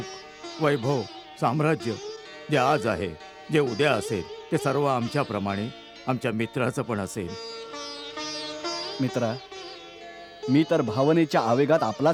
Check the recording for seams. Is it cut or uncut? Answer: uncut